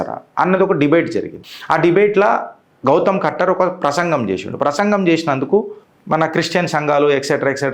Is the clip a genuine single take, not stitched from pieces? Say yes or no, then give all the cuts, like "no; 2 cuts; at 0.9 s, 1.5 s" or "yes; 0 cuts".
yes; 0 cuts